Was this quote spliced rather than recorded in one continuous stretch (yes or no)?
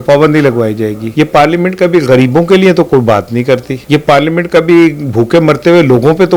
yes